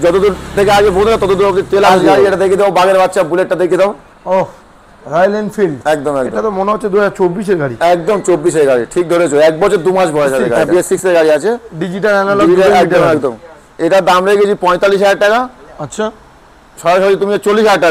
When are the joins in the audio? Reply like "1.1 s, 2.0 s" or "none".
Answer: 2.0 s, 6.3 s, 10.6 s

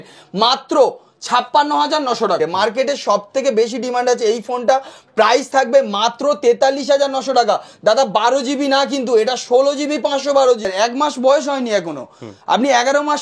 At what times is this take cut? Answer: 2.4 s, 10.7 s

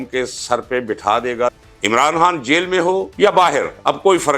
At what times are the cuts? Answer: 1.6 s, 3.1 s

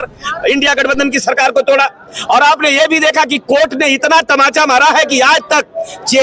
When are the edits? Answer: none

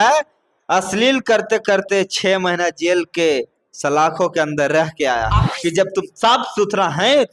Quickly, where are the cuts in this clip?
5.5 s

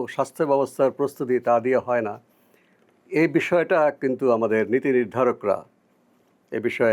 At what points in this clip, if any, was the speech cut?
none

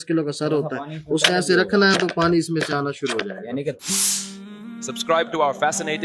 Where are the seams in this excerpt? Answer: 3.8 s

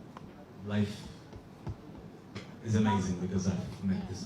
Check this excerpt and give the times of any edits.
none

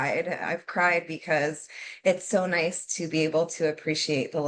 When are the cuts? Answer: none

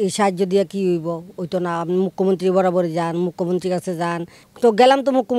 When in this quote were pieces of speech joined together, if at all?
4.4 s

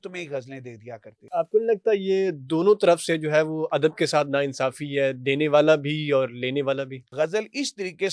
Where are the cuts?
1.2 s, 7.0 s

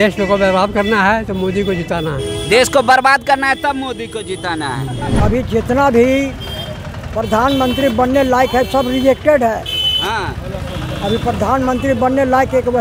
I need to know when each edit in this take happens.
5.1 s

